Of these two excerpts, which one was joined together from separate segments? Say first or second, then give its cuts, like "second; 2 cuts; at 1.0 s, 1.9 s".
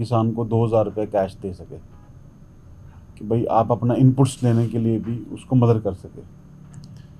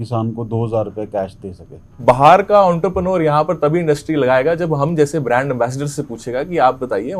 second; 1 cut; at 2.0 s